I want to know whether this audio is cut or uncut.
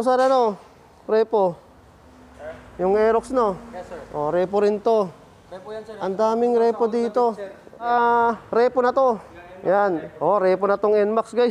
cut